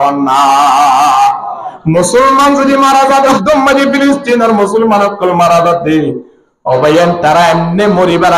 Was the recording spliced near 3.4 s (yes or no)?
yes